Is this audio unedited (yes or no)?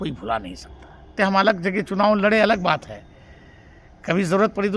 no